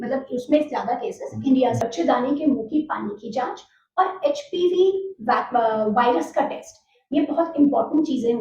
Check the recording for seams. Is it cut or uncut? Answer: cut